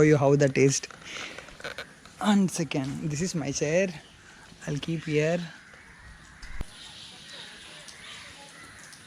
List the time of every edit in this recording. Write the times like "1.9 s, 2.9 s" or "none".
6.6 s